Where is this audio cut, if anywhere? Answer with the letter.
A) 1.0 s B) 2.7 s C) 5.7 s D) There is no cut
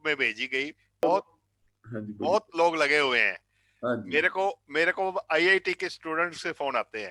A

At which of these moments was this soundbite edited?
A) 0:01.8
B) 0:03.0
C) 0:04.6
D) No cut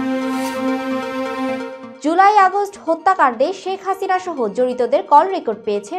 A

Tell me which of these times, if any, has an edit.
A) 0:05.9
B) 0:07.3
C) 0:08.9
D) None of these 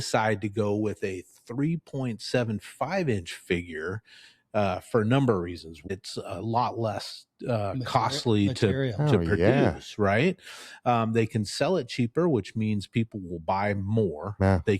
A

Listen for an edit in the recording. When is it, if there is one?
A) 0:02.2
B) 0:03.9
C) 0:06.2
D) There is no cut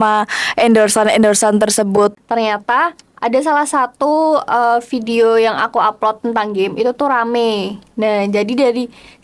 A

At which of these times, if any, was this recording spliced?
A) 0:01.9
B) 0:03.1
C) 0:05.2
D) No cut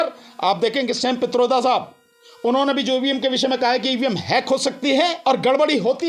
C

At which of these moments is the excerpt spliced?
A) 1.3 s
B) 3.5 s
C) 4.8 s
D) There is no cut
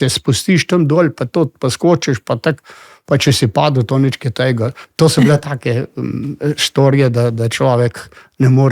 C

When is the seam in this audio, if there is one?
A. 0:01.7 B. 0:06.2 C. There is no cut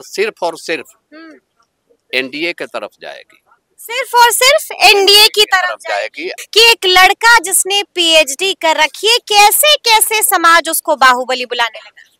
B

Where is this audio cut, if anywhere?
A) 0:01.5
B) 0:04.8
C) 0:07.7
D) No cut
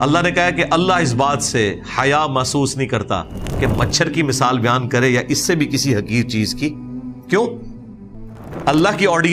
D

